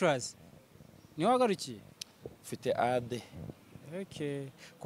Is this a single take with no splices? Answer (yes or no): yes